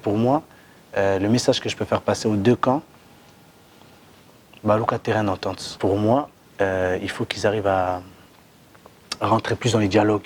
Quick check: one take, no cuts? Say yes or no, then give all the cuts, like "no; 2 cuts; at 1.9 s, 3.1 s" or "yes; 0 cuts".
no; 1 cut; at 5.7 s